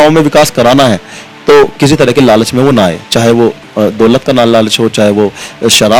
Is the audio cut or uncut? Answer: uncut